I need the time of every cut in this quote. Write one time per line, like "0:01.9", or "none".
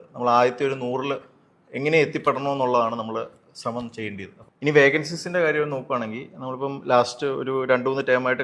0:04.3